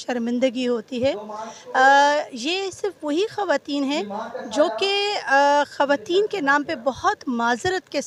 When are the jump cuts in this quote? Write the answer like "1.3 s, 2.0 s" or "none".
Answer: none